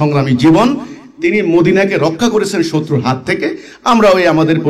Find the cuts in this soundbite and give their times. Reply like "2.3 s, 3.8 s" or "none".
none